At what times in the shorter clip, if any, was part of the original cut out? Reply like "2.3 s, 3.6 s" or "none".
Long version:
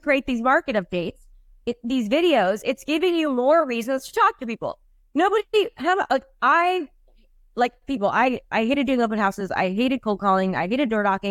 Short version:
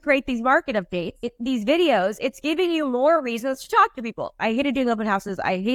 1.2 s, 4.3 s